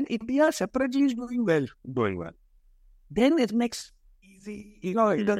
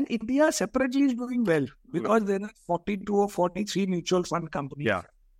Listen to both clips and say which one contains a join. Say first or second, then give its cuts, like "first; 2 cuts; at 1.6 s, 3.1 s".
second; 1 cut; at 1.8 s